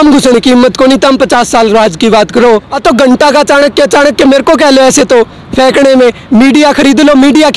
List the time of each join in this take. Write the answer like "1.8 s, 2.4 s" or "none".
2.7 s